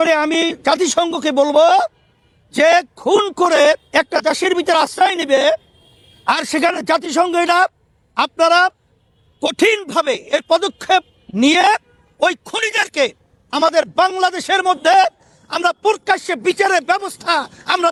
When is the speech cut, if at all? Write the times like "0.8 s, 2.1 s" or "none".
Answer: none